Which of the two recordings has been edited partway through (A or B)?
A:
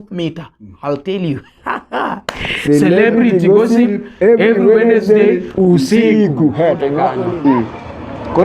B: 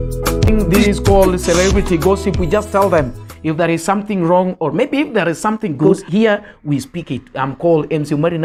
A